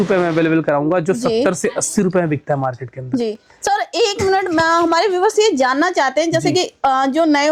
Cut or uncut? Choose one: uncut